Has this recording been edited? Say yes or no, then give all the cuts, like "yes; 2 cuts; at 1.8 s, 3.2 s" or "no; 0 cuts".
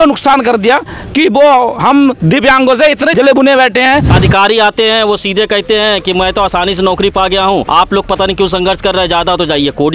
yes; 3 cuts; at 3.1 s, 4.1 s, 7.7 s